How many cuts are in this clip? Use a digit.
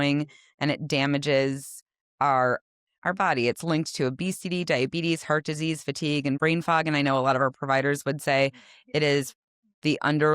1